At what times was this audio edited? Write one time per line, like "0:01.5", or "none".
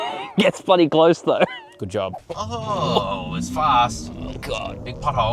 0:02.3